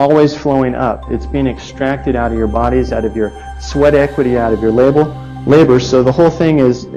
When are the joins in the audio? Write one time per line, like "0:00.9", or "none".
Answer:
none